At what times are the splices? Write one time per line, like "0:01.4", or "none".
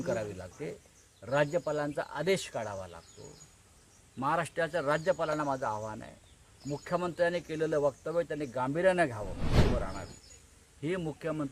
0:09.6